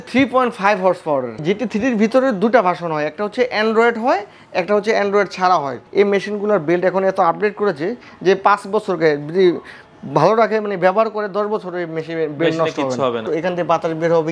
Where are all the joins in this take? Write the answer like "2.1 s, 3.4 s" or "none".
1.4 s, 5.8 s, 13.2 s